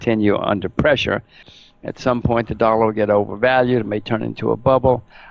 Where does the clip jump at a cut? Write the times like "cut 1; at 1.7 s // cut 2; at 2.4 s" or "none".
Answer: cut 1; at 1.4 s